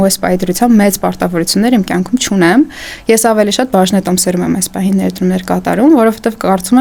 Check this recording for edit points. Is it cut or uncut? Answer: uncut